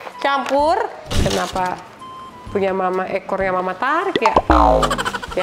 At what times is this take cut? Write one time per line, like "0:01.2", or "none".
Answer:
0:01.0